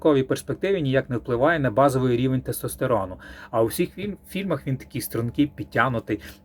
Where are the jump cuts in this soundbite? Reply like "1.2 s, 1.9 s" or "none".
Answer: 3.4 s